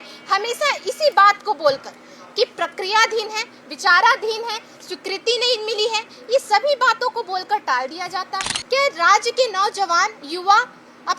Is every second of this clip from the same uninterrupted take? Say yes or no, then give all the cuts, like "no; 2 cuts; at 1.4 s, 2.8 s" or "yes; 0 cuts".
no; 1 cut; at 8.5 s